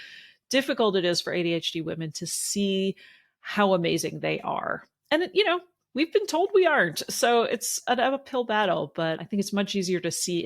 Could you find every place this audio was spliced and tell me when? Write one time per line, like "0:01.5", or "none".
0:07.8
0:09.2